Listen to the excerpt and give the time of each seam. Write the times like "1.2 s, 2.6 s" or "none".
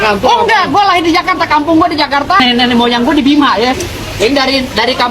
2.4 s, 3.9 s